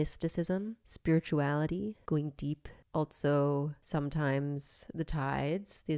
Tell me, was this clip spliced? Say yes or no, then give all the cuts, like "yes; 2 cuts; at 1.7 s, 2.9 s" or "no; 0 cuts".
yes; 1 cut; at 2.0 s